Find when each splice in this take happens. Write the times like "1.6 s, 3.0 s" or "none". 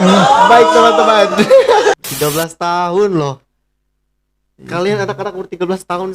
2.0 s